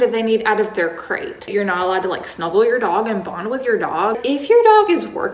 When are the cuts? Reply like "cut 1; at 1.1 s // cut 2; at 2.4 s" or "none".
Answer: cut 1; at 1.5 s // cut 2; at 4.2 s